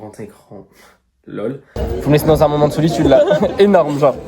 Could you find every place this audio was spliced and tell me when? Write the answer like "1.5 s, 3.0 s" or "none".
1.7 s